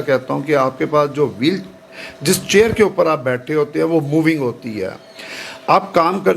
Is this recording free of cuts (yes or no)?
yes